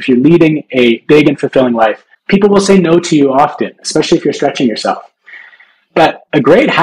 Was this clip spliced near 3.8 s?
no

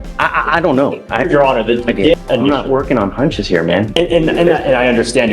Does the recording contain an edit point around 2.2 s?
yes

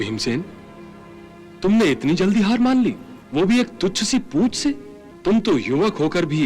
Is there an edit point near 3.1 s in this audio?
no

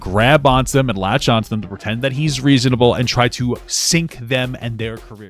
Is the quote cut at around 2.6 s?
no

